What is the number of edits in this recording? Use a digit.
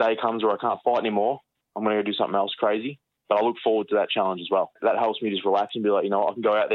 1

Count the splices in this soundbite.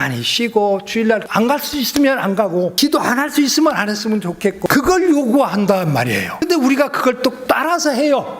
5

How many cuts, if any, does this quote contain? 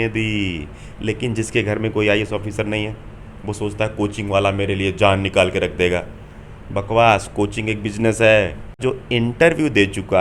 1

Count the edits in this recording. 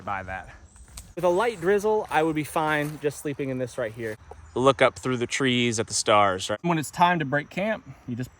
3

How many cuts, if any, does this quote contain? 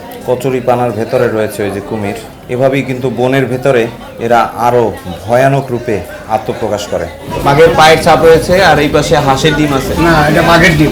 2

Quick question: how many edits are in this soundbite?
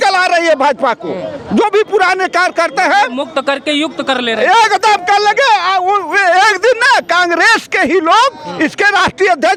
0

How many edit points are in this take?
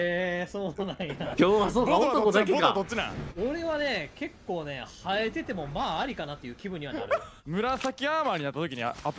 2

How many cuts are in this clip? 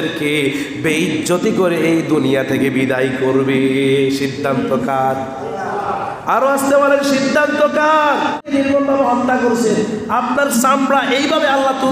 1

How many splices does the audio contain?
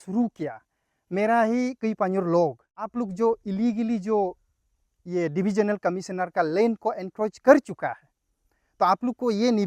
1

